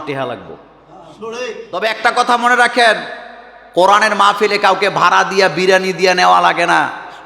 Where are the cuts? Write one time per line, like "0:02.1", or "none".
0:01.7